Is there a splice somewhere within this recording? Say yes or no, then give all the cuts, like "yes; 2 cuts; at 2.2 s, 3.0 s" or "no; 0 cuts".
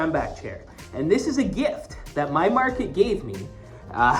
no; 0 cuts